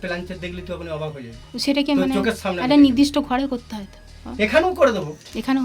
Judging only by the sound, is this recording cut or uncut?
uncut